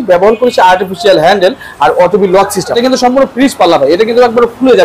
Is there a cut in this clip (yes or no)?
yes